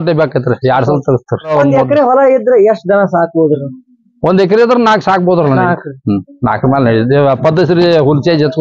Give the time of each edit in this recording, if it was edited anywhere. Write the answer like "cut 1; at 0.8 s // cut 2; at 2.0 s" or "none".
cut 1; at 1.5 s

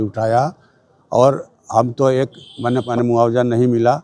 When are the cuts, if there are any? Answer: cut 1; at 2.9 s

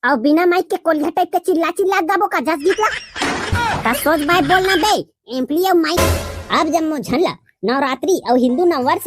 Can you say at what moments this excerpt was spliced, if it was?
cut 1; at 6.0 s

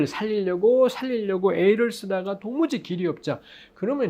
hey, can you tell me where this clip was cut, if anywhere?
none

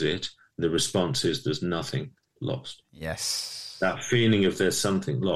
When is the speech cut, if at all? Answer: none

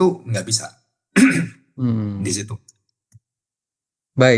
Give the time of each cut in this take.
none

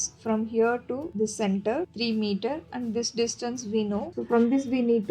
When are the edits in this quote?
cut 1; at 1.1 s // cut 2; at 1.9 s // cut 3; at 4.1 s

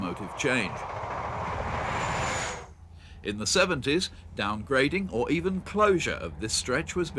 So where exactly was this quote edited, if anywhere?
none

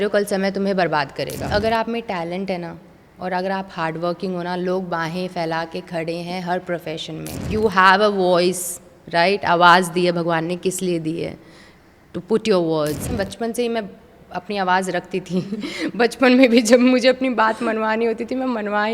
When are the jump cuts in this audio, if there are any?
cut 1; at 1.5 s // cut 2; at 7.4 s // cut 3; at 13.1 s

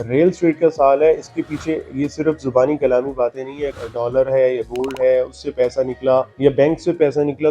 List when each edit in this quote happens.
cut 1; at 3.7 s // cut 2; at 6.3 s

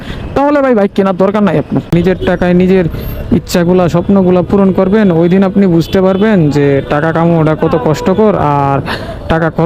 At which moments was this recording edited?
cut 1; at 1.9 s

